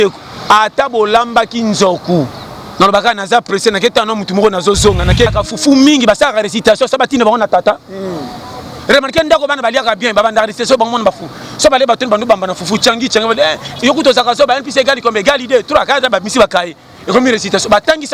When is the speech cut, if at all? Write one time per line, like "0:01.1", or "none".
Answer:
0:05.3